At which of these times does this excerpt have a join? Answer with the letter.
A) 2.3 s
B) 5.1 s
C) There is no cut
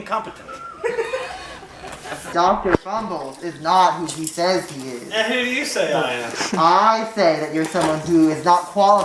A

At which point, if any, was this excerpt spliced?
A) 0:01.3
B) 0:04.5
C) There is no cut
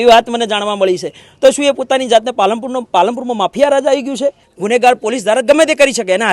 B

